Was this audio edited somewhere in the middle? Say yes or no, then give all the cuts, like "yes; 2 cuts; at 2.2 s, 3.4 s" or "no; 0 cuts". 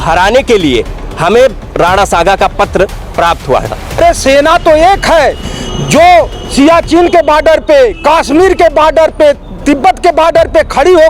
yes; 1 cut; at 4.0 s